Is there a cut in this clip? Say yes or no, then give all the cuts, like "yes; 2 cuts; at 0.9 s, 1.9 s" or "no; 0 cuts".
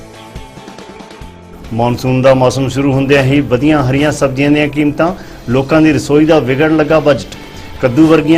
yes; 1 cut; at 1.2 s